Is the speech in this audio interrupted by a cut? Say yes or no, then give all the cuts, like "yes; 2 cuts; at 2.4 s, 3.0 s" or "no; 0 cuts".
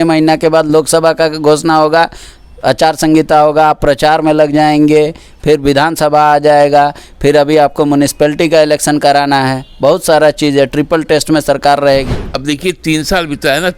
yes; 1 cut; at 12.2 s